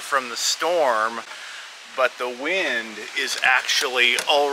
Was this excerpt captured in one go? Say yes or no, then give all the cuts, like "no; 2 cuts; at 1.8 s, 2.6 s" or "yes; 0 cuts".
yes; 0 cuts